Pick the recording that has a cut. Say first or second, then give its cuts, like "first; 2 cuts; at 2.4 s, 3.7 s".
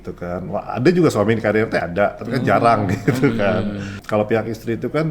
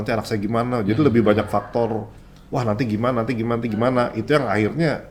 first; 1 cut; at 4.0 s